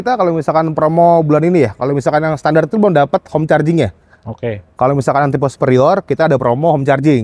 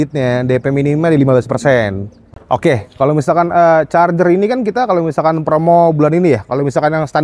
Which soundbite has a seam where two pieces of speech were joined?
second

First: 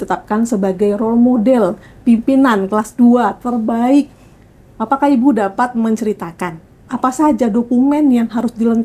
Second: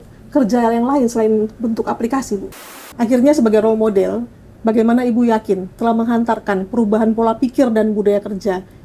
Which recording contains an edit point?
second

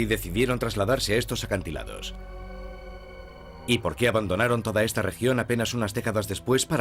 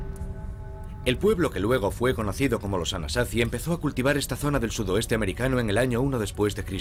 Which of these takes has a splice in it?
first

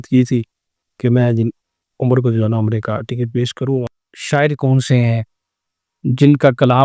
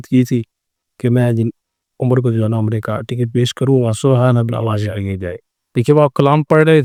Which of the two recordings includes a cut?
first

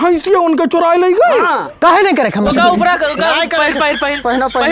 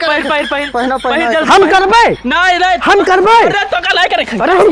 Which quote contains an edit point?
first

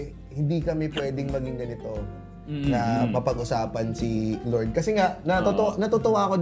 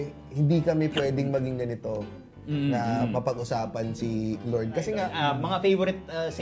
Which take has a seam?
second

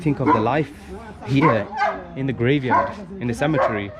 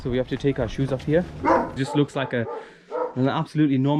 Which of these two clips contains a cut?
second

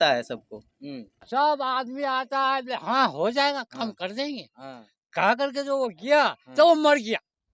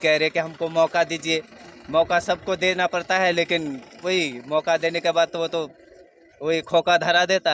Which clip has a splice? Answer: first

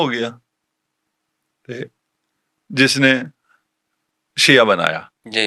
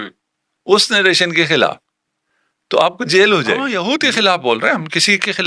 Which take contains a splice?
second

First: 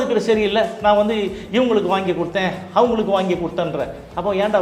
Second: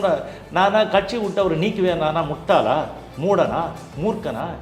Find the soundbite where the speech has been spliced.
second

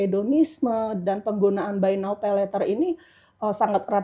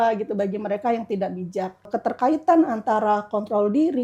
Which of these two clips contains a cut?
second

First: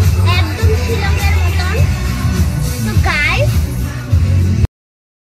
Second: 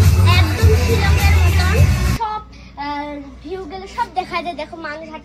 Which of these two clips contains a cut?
second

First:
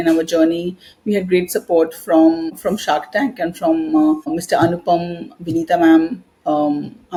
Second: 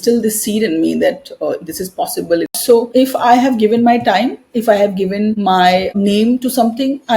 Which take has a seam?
second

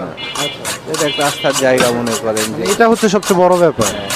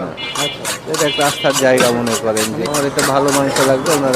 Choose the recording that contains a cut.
second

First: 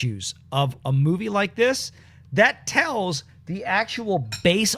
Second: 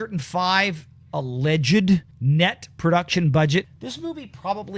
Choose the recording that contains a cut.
second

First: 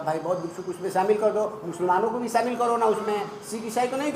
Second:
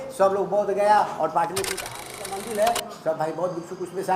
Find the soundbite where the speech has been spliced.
second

